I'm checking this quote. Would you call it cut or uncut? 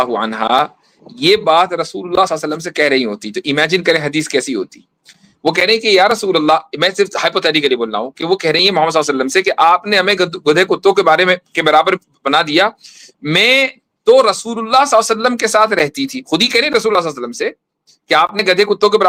uncut